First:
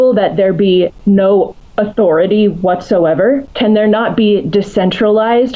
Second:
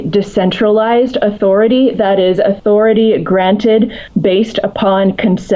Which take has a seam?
first; 3 cuts; at 1.0 s, 1.6 s, 3.5 s

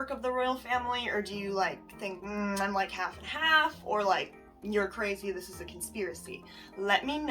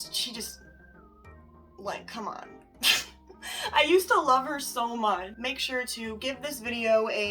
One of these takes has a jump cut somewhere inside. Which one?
second; 1 cut; at 5.3 s

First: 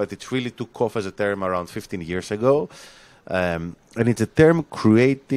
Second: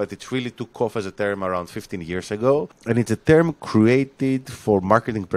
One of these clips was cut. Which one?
second; 1 cut; at 2.7 s

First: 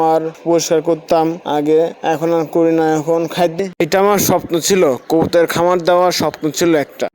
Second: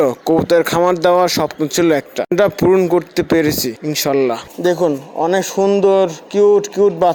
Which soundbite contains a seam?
first; 1 cut; at 3.6 s

